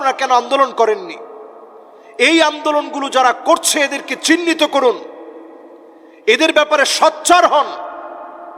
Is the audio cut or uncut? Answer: uncut